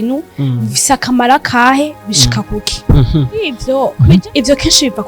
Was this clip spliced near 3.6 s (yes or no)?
yes